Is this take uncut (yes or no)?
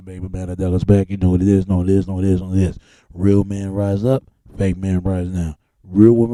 yes